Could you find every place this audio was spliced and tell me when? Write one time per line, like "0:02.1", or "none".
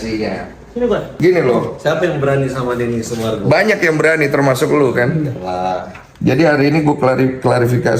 0:01.1